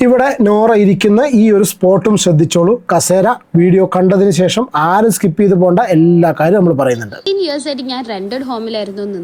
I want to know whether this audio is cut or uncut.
uncut